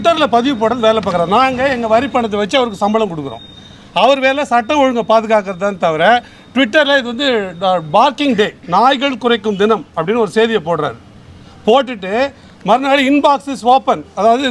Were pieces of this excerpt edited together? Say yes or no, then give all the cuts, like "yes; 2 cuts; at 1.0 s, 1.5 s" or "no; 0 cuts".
no; 0 cuts